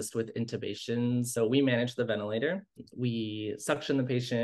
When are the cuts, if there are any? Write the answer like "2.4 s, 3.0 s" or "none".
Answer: 1.4 s, 2.8 s